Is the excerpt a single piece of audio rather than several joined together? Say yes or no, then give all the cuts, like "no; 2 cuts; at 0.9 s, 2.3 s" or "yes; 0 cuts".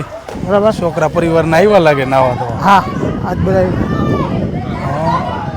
yes; 0 cuts